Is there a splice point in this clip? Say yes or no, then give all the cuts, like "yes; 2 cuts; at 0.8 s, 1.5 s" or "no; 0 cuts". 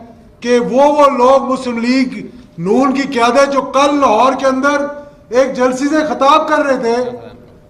no; 0 cuts